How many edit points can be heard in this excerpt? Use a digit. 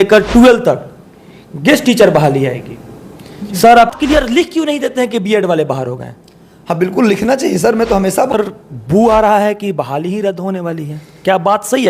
2